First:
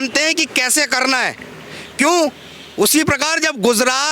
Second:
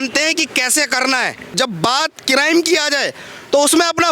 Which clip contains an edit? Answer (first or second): second